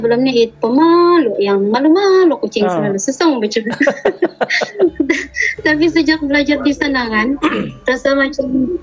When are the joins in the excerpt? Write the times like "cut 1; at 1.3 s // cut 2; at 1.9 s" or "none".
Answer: none

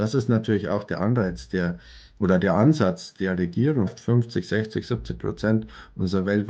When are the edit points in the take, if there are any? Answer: cut 1; at 3.9 s

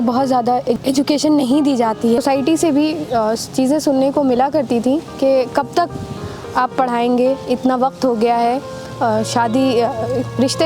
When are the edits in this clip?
cut 1; at 0.8 s // cut 2; at 2.2 s

